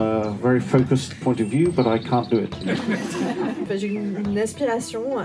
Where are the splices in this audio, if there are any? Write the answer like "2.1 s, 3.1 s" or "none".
2.6 s, 3.7 s